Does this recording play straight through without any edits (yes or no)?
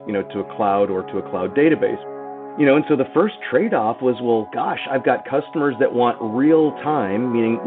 no